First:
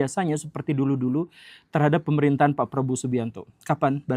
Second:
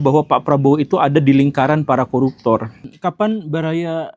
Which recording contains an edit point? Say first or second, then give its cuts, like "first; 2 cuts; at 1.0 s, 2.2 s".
second; 1 cut; at 3.0 s